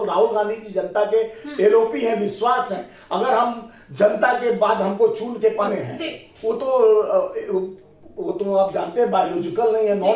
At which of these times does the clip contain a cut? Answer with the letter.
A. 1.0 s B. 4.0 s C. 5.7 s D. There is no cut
C